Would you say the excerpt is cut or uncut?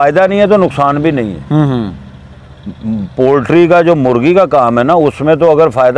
uncut